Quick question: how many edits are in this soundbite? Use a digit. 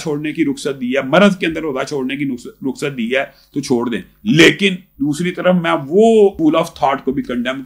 1